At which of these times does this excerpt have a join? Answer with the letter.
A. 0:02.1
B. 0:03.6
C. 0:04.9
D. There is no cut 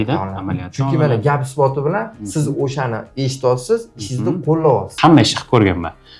C